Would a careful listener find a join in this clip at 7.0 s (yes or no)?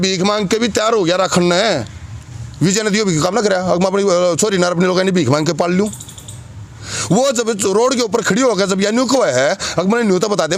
no